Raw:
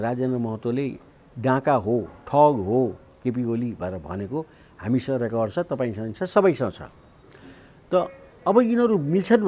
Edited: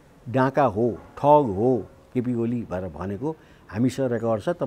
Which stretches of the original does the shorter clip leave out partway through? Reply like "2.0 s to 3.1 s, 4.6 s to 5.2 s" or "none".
none